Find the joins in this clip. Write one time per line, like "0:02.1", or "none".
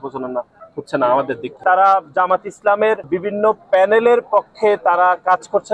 0:01.6
0:03.1